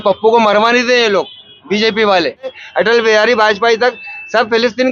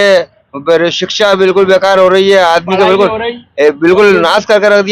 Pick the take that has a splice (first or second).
first